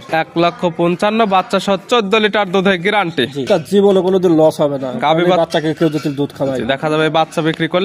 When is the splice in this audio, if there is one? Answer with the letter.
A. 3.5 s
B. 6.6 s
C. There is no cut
A